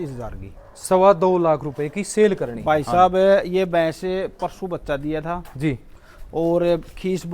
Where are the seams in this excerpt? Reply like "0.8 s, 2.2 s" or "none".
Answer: 2.5 s